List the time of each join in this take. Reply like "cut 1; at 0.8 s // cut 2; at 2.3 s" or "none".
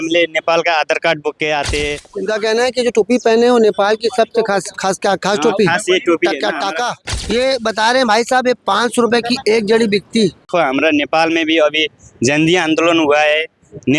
cut 1; at 2.1 s // cut 2; at 7.0 s // cut 3; at 10.5 s